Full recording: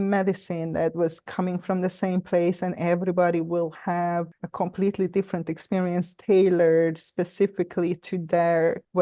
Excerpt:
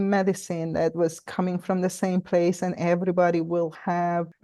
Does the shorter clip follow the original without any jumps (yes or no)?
yes